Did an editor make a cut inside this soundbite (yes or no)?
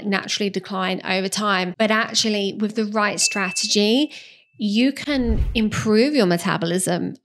yes